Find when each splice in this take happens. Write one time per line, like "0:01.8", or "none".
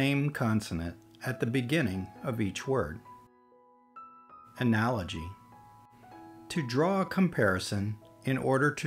none